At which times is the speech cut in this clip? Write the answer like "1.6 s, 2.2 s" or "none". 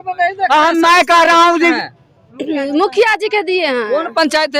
1.8 s